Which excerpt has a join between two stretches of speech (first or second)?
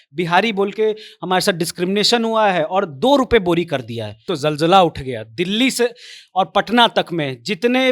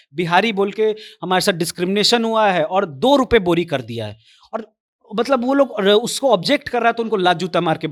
first